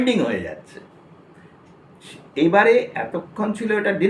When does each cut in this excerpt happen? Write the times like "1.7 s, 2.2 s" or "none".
none